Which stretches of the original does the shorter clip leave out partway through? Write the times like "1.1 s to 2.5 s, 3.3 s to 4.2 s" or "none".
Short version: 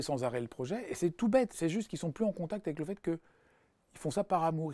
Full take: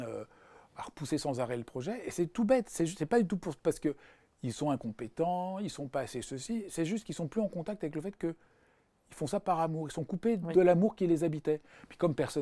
2.7 s to 6.7 s